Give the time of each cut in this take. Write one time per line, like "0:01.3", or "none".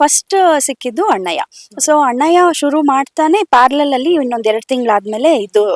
none